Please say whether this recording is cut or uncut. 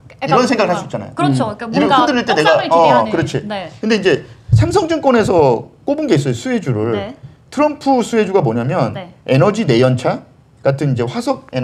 uncut